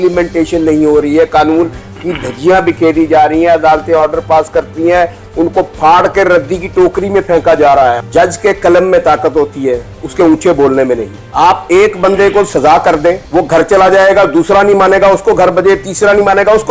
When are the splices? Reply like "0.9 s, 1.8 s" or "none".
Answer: 8.0 s, 11.2 s, 13.2 s